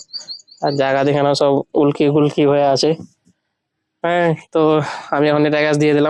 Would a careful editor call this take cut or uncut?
uncut